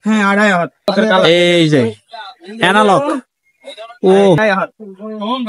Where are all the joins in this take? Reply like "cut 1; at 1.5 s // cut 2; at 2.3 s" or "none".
cut 1; at 0.9 s // cut 2; at 4.4 s